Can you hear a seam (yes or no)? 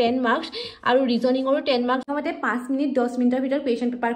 yes